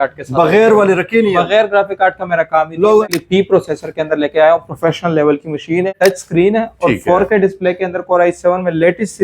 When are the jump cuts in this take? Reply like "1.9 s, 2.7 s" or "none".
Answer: 3.0 s, 5.9 s